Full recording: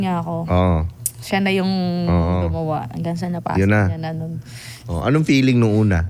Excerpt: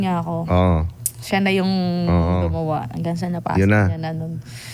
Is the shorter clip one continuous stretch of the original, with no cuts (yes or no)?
yes